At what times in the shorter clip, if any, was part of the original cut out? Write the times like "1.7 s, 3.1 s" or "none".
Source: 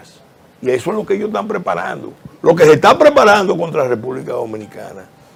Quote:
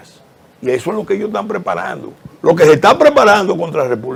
none